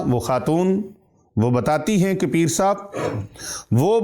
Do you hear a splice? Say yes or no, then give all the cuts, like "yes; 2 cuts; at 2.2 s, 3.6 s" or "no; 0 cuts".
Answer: no; 0 cuts